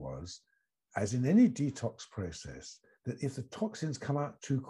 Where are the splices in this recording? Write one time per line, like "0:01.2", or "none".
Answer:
none

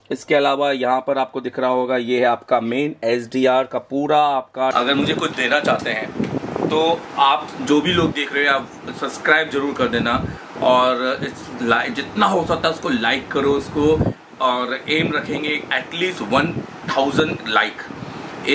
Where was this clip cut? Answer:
0:04.7

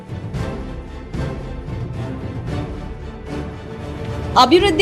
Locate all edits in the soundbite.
0:03.9

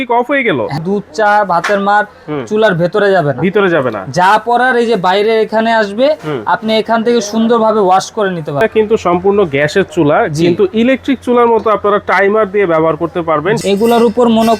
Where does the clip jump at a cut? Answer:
0:00.7
0:08.6
0:13.6

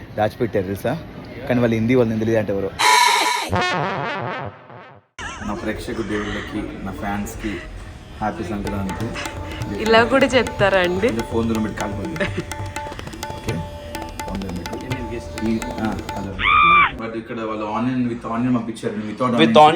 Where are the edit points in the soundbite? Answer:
0:05.2
0:17.0

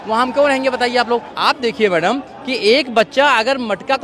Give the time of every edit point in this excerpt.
0:01.3

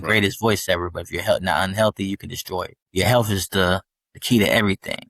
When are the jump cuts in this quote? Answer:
0:02.9

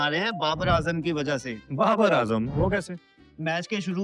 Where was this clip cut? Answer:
none

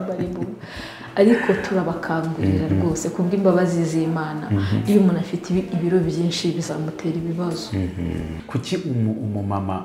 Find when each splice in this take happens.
0:08.4

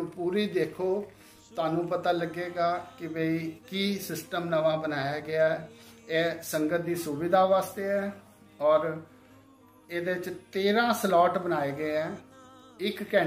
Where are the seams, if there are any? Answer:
none

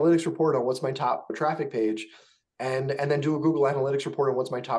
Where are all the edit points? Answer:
0:01.3

